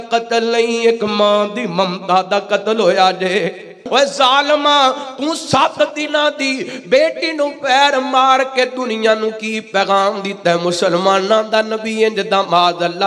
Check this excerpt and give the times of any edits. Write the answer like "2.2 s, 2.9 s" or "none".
3.8 s